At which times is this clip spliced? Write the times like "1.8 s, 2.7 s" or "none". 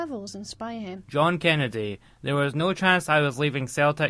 1.0 s